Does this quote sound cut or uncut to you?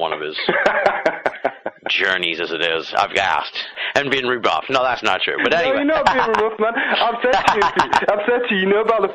cut